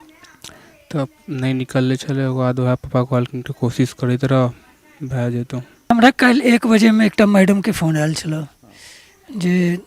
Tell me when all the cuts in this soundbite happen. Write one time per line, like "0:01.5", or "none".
0:05.9